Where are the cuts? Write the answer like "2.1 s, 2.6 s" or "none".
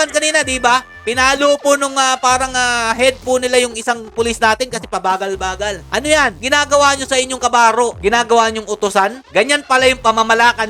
none

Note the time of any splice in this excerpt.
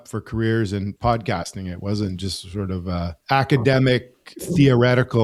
none

